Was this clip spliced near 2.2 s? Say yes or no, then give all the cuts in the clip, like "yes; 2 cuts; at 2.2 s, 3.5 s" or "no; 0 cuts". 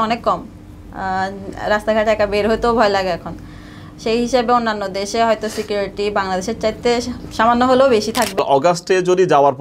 no; 1 cut; at 8.3 s